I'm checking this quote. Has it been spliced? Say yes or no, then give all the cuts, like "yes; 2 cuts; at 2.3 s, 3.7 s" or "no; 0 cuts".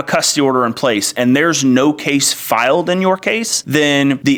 no; 0 cuts